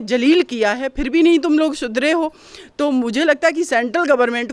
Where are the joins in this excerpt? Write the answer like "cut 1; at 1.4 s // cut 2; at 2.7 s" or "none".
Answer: none

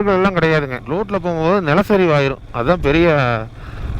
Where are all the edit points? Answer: cut 1; at 1.1 s

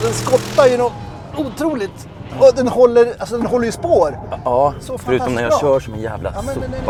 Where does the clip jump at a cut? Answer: none

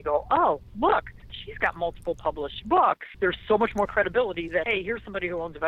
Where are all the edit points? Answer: cut 1; at 3.1 s // cut 2; at 4.7 s

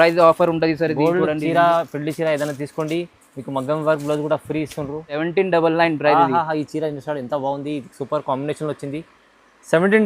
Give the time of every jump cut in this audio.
cut 1; at 5.1 s

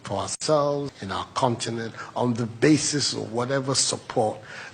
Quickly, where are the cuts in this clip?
cut 1; at 1.0 s

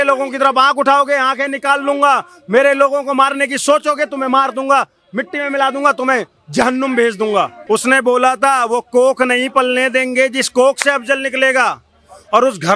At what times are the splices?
cut 1; at 7.6 s

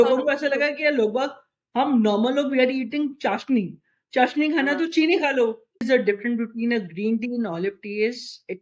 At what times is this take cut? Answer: cut 1; at 5.8 s

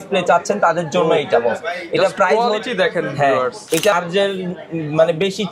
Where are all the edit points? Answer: cut 1; at 3.9 s

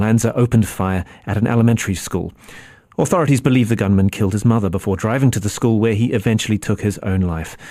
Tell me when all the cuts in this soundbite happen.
none

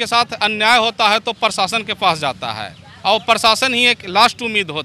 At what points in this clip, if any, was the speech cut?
none

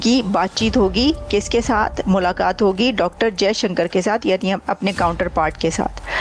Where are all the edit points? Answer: none

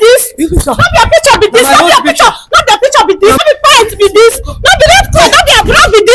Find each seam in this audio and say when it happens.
cut 1; at 3.4 s

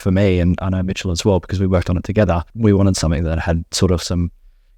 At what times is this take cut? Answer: cut 1; at 2.5 s

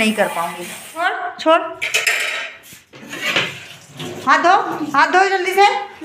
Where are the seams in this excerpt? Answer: cut 1; at 1.1 s

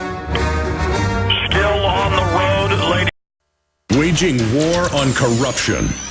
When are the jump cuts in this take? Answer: none

